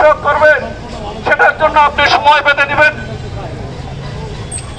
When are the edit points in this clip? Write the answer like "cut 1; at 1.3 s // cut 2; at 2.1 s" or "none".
none